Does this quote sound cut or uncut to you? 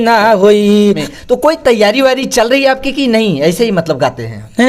cut